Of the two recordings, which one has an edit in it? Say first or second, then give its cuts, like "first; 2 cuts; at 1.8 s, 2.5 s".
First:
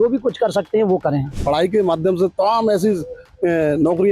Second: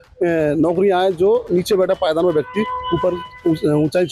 first; 1 cut; at 1.4 s